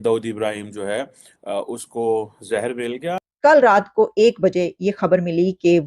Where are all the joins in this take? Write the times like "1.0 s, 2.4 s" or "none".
3.2 s